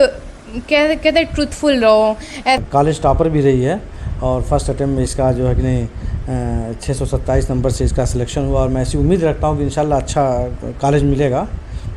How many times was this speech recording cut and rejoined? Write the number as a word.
one